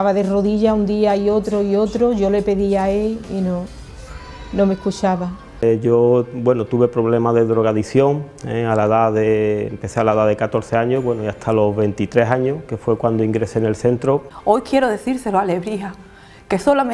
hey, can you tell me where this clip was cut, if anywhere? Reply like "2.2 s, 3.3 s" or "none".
5.6 s, 14.3 s